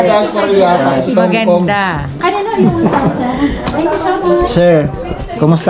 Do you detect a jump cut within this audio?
no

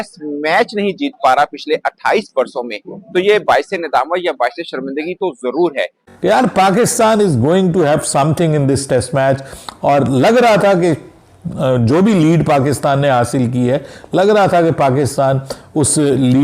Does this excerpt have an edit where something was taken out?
yes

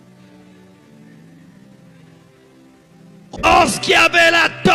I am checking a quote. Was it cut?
yes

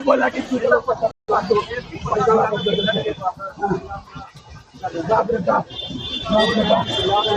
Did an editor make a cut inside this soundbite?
yes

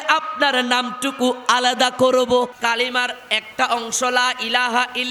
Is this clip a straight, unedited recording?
no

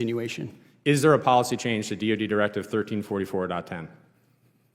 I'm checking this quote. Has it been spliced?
no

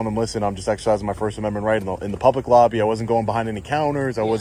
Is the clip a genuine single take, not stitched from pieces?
yes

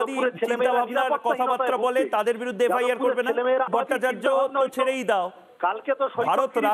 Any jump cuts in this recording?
yes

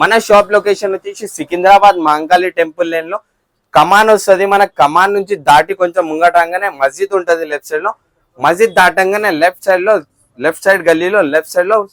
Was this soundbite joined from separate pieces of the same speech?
no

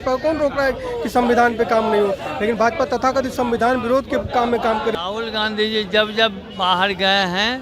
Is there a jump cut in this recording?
yes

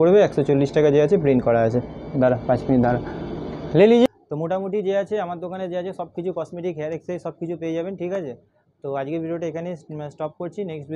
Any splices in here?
no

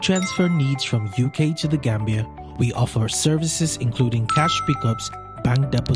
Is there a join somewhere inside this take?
no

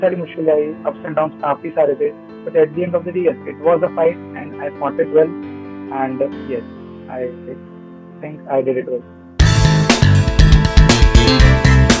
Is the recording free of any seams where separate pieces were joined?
yes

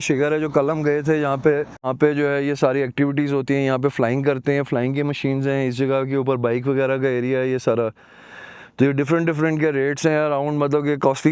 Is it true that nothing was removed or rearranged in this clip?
no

